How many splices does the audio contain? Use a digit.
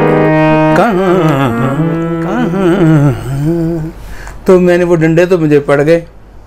1